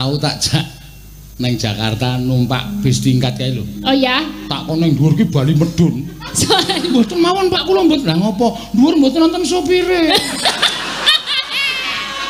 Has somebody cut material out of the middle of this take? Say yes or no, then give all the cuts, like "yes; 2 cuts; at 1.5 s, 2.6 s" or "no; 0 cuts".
no; 0 cuts